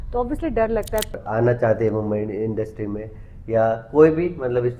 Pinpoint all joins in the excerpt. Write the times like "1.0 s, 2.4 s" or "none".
1.1 s